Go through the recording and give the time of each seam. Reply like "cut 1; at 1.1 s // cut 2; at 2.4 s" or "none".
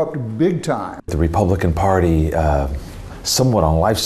cut 1; at 1.0 s